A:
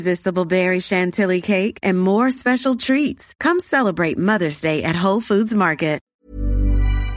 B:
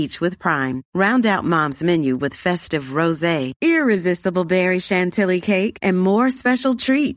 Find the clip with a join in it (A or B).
A